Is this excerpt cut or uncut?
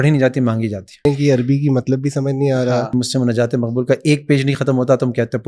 cut